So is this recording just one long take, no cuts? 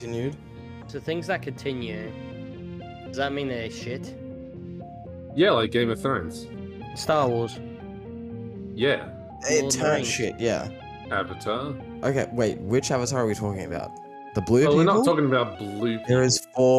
no; 3 cuts; at 10.9 s, 11.8 s, 16.1 s

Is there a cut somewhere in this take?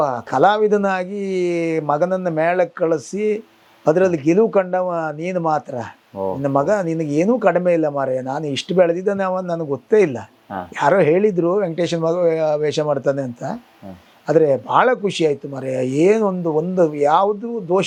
no; 0 cuts

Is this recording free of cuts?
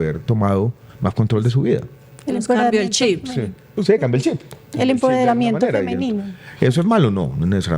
yes; 0 cuts

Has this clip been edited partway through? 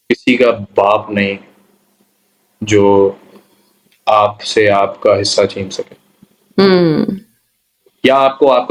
no; 0 cuts

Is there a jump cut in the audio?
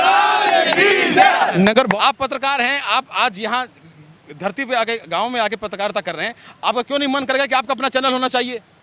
yes; 1 cut; at 1.9 s

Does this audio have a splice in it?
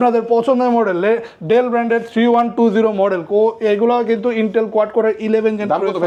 no; 0 cuts

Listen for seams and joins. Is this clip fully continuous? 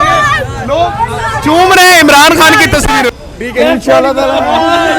no; 1 cut; at 3.1 s

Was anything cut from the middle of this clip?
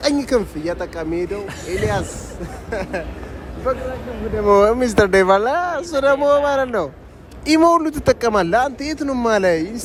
no; 0 cuts

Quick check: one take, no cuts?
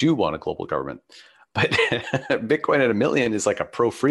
no; 1 cut; at 1.5 s

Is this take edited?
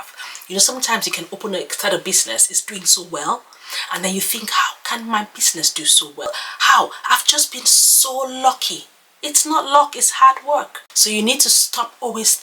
no; 0 cuts

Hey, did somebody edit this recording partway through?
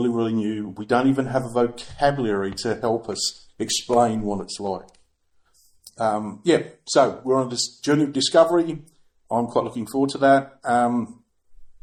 no; 0 cuts

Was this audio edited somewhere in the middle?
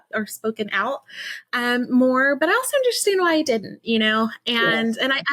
no; 0 cuts

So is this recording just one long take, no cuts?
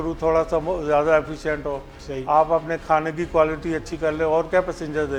yes; 0 cuts

